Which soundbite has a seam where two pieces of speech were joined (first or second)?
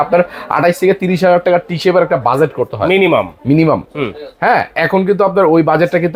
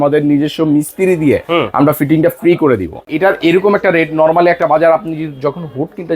second